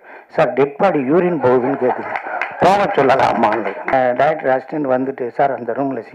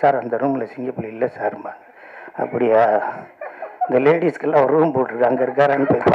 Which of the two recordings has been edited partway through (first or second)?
first